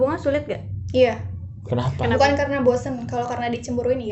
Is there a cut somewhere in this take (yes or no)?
no